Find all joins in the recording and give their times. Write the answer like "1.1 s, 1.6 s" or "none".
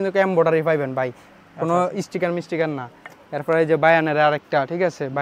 none